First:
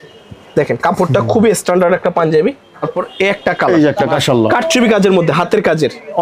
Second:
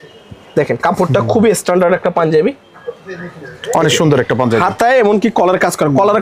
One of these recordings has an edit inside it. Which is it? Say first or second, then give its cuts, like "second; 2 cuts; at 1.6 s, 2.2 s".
first; 2 cuts; at 3.0 s, 4.1 s